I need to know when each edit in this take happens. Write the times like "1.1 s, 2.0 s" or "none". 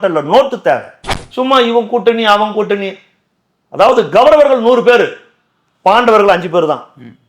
1.2 s